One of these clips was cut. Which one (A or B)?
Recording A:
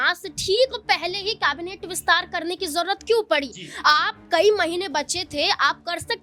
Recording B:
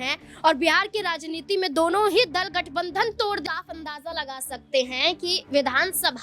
B